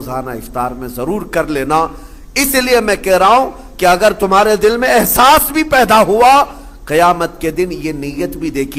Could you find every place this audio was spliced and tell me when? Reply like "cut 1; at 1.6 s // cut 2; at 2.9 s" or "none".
none

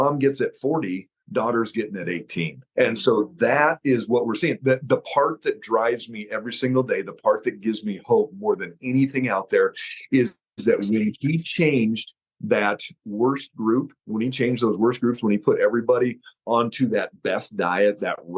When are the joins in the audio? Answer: cut 1; at 2.6 s

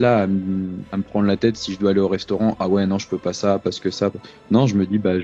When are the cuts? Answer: none

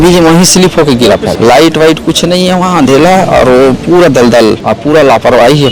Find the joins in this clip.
cut 1; at 1.3 s // cut 2; at 4.7 s

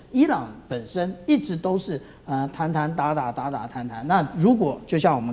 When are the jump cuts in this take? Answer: none

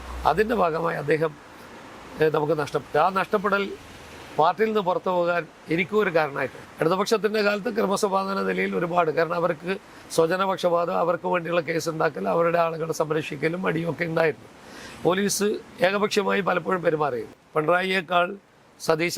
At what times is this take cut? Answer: cut 1; at 6.6 s // cut 2; at 17.4 s

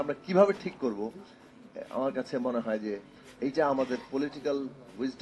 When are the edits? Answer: none

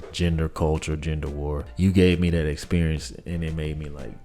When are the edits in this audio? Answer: cut 1; at 1.6 s

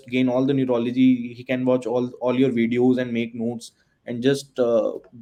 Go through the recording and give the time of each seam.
none

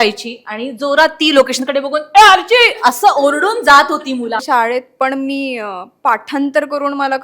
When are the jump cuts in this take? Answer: cut 1; at 4.4 s

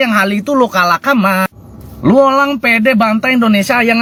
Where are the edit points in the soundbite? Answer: none

